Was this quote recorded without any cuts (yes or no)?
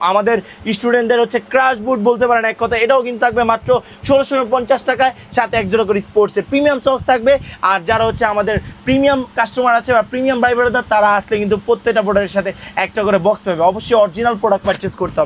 yes